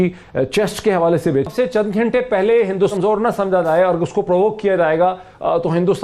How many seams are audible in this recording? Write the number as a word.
two